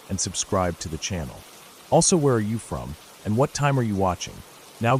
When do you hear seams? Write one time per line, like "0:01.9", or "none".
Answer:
none